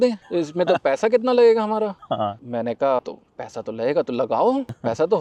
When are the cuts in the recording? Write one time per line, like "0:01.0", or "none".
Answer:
none